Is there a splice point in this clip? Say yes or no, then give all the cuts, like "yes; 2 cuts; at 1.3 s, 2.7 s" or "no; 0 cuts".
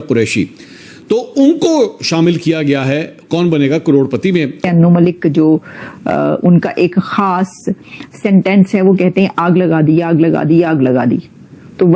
yes; 1 cut; at 4.6 s